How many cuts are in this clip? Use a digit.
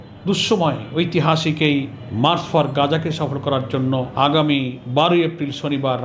3